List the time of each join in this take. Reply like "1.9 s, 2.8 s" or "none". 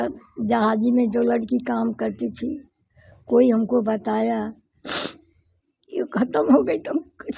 none